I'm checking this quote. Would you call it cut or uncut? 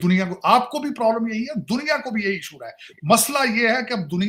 uncut